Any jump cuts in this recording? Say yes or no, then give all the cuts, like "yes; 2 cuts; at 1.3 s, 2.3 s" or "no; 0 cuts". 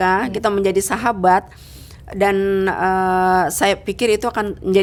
no; 0 cuts